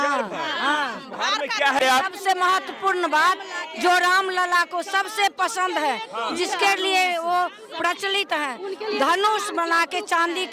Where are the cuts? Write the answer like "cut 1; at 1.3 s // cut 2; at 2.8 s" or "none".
cut 1; at 1.8 s